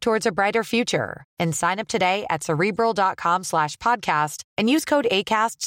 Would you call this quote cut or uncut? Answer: uncut